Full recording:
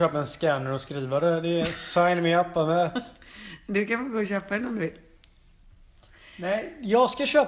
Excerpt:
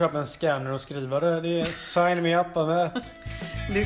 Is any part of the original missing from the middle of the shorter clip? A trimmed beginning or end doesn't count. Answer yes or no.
no